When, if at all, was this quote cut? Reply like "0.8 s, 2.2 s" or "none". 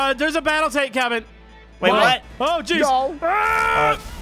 none